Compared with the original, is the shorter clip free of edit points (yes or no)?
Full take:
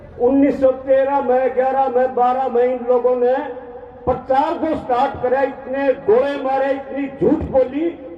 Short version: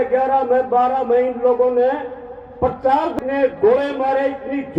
no